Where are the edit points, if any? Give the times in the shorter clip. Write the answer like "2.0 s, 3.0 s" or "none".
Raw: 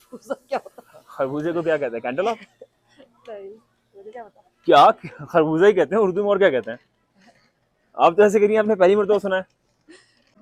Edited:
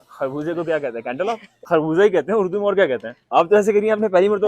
1.5 s, 3.1 s